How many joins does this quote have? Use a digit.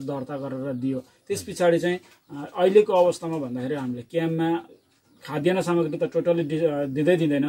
0